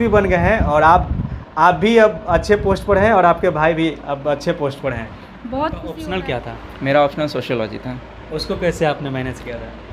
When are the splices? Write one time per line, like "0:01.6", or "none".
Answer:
0:05.9